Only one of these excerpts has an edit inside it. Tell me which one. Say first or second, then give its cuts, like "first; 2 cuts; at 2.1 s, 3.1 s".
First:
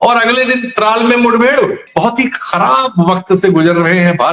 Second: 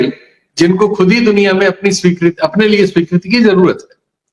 first; 1 cut; at 1.8 s